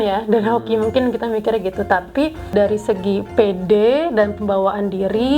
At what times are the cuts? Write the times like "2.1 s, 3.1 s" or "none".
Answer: 2.5 s

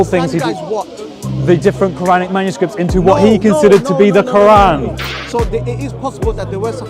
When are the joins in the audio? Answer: 5.2 s

